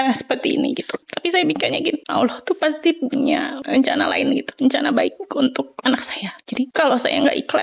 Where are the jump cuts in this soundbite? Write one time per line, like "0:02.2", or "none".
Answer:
0:01.1
0:02.0
0:03.6
0:06.7

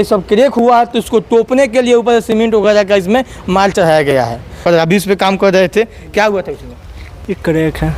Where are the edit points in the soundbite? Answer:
0:04.6

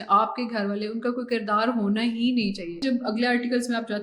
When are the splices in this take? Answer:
0:02.8

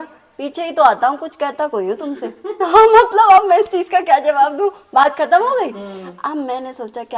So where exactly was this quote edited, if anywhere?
none

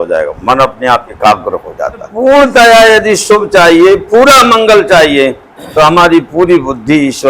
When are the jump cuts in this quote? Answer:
0:02.1

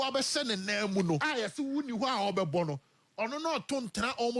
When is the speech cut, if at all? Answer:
0:01.2

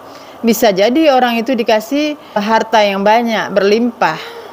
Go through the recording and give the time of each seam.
0:02.4

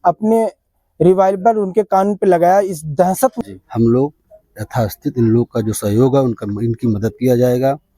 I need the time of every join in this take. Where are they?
0:03.4

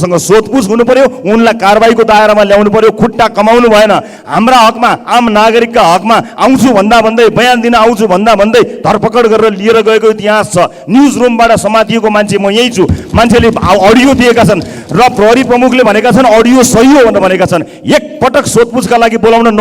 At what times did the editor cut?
none

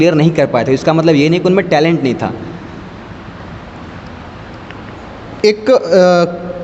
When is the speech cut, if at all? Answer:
none

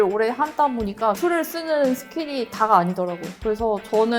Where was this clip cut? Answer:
0:03.3

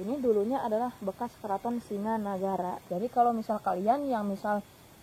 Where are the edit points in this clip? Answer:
0:02.8

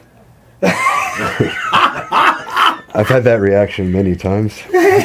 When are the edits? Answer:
none

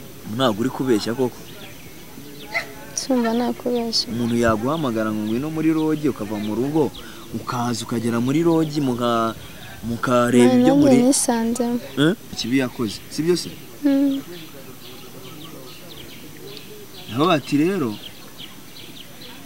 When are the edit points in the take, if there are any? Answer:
0:12.4

